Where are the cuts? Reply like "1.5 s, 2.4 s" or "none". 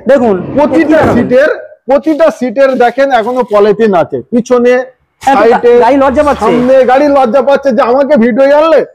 none